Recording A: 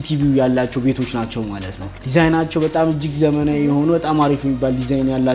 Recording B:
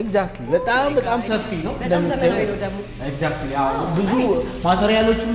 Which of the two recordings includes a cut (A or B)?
A